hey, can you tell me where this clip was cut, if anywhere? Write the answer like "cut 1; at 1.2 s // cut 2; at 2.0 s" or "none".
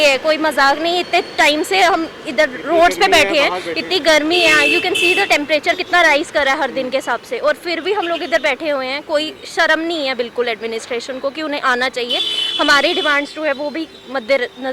none